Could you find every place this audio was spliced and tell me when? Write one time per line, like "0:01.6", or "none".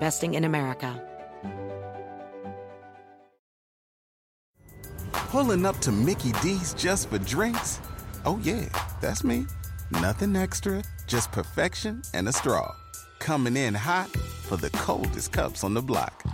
0:01.0